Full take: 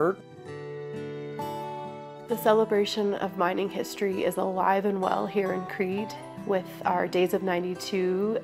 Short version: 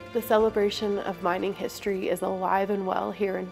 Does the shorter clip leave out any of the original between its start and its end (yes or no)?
no